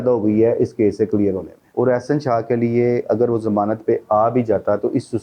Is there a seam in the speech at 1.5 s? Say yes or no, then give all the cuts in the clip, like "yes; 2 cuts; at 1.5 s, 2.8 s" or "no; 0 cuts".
yes; 1 cut; at 1.5 s